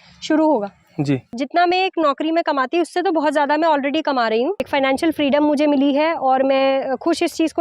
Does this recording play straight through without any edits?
no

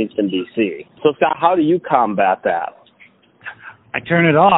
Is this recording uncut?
no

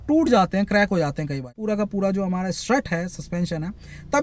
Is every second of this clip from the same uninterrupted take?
no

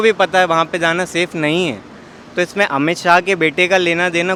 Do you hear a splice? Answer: no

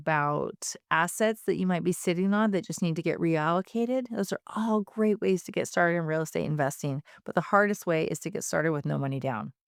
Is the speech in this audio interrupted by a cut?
no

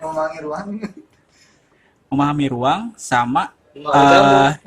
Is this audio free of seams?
yes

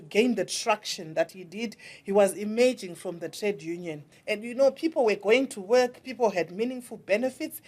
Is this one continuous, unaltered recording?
no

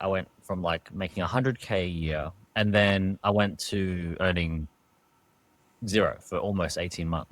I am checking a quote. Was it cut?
yes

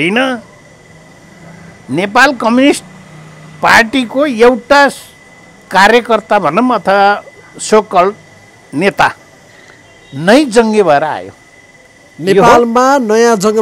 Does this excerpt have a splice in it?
no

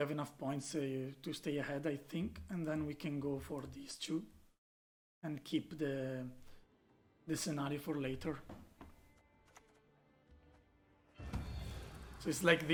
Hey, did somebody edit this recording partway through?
no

